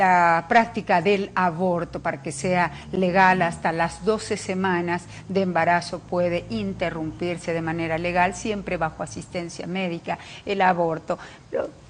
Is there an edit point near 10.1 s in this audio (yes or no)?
no